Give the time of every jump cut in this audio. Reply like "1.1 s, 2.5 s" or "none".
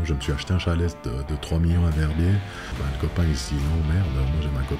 2.7 s